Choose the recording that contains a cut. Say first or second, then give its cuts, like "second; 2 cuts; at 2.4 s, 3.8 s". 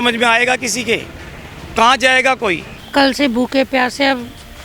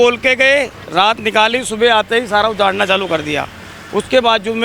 first; 1 cut; at 2.7 s